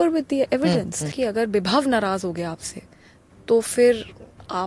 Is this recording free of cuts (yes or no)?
no